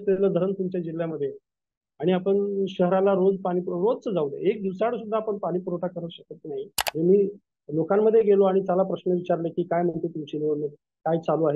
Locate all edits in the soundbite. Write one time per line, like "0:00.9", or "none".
0:06.8